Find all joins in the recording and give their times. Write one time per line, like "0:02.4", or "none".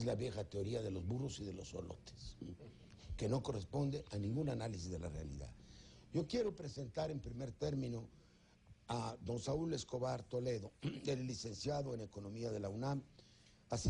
0:07.4